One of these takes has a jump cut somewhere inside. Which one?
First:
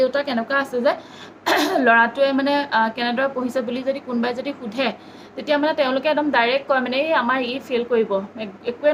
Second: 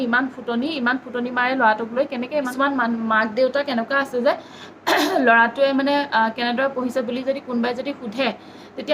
second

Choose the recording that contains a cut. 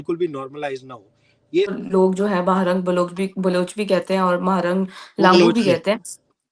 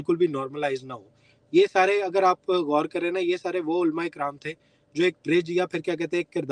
first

